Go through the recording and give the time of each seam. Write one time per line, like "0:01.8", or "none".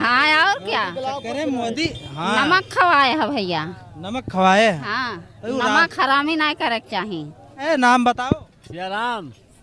0:07.7